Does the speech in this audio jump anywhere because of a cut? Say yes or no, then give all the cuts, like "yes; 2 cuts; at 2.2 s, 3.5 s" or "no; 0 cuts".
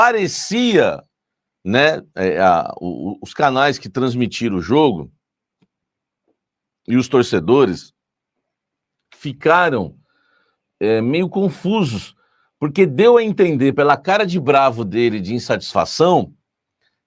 no; 0 cuts